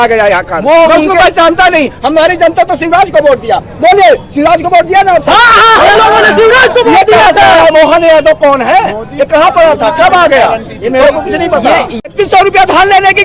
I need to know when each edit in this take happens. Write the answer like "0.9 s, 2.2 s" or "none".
12.0 s